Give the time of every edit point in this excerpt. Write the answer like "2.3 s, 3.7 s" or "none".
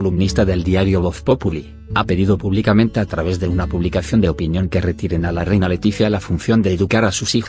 6.3 s